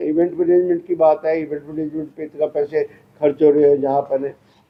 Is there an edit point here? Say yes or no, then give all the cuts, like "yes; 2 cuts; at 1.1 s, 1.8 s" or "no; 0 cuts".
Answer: no; 0 cuts